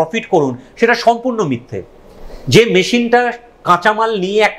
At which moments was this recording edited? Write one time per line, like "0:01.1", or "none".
none

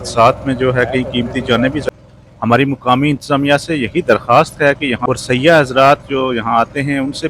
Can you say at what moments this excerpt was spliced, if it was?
0:01.8
0:05.0

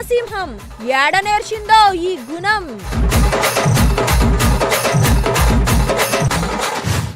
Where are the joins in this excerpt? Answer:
none

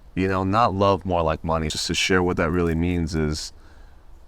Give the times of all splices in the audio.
0:01.8

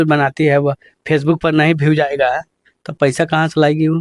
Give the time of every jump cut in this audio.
none

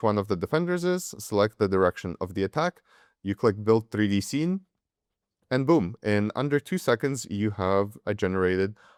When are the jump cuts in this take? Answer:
none

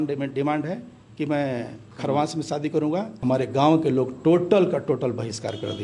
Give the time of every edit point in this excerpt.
0:03.1

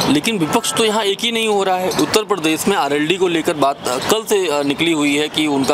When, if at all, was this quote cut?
none

